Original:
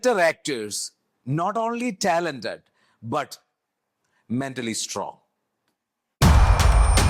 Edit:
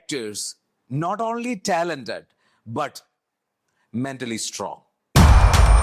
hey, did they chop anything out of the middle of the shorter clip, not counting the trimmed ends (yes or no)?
yes